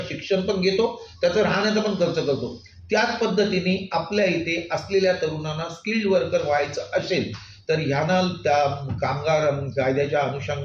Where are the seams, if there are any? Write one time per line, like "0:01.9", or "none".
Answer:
none